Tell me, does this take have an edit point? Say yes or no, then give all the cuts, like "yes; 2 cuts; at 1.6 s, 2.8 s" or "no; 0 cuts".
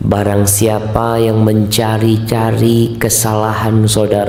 no; 0 cuts